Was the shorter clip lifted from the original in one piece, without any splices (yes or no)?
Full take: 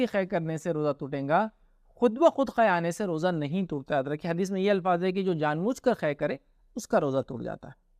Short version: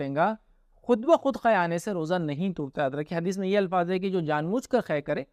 yes